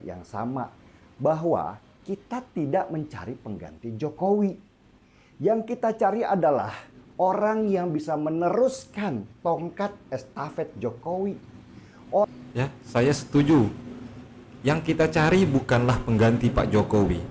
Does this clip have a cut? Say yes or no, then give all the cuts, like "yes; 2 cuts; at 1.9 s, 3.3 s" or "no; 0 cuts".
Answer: no; 0 cuts